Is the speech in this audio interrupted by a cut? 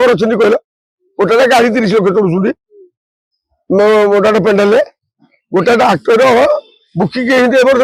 no; 0 cuts

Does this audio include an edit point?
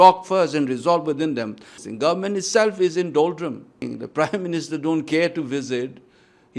yes; 2 cuts; at 1.8 s, 3.8 s

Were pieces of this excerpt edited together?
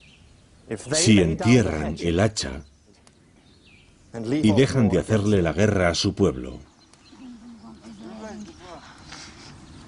yes; 1 cut; at 4.1 s

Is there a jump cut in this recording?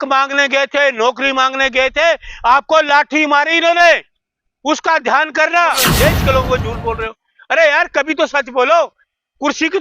yes; 1 cut; at 5.9 s

